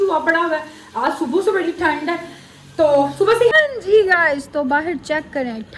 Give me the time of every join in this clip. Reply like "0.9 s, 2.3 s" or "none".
3.5 s

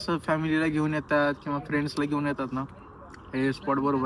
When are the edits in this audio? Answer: none

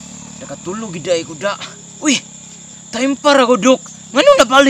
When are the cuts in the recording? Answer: none

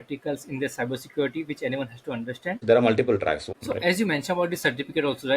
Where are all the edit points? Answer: 2.6 s, 3.4 s

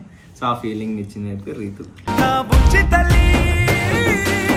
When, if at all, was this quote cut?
none

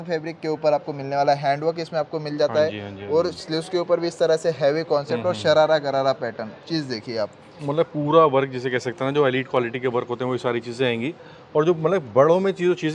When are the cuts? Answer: none

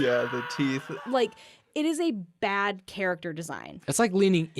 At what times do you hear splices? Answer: 0.9 s, 3.7 s

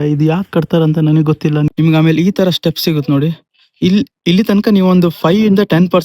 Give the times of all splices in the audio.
1.7 s

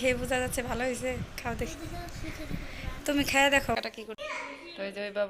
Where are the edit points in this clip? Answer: 3.8 s

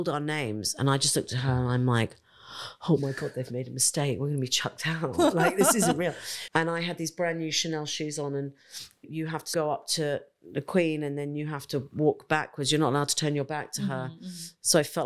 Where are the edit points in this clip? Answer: 6.3 s, 9.2 s

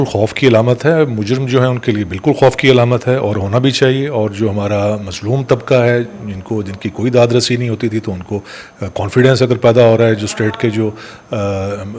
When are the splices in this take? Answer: none

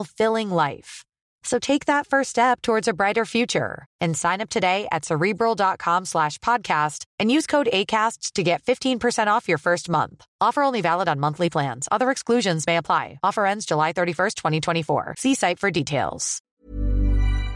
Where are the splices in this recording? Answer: 16.3 s

